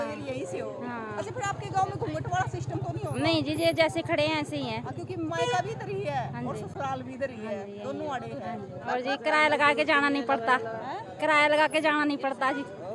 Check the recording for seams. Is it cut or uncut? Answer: uncut